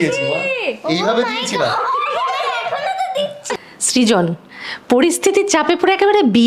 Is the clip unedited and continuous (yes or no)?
no